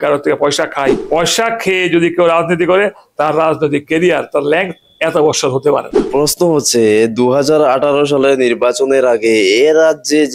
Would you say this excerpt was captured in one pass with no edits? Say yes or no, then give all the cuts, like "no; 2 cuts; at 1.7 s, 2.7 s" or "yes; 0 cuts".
no; 2 cuts; at 1.0 s, 6.1 s